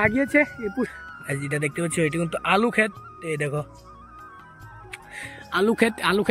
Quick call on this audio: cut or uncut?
cut